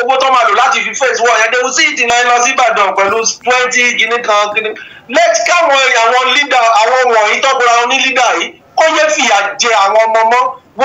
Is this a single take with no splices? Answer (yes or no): no